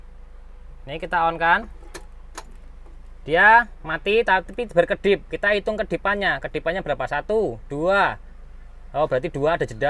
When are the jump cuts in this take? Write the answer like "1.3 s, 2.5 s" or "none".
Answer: none